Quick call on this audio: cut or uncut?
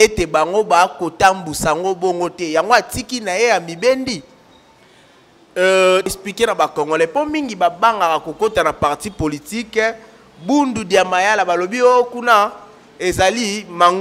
cut